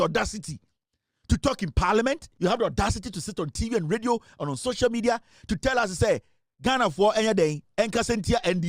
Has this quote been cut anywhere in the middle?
yes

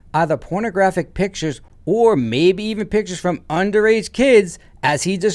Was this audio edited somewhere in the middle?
no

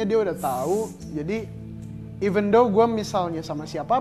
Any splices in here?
no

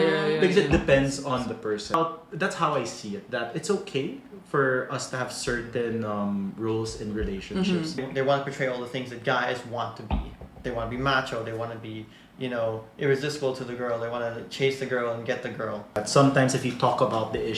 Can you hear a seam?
yes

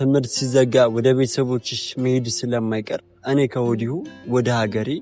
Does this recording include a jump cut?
no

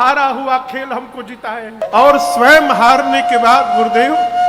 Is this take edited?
yes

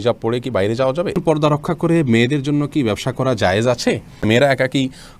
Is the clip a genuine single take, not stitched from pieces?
no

